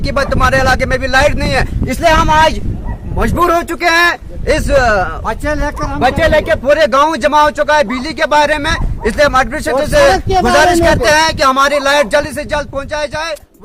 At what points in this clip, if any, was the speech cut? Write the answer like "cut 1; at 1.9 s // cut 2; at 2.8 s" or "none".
none